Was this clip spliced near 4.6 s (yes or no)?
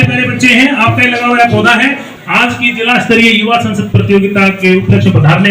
no